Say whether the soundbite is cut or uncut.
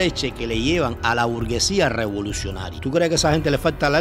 cut